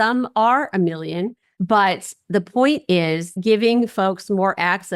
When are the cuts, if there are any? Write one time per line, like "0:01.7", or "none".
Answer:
0:01.5
0:03.4